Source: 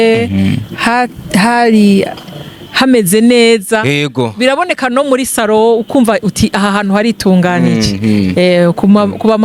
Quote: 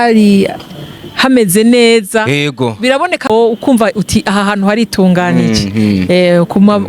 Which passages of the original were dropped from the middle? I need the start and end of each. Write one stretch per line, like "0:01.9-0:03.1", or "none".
0:04.9-0:05.6